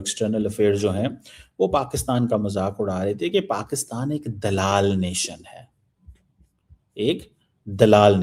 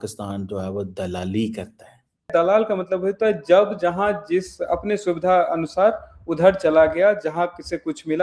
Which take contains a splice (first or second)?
second